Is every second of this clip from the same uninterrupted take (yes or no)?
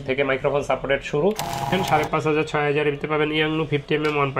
no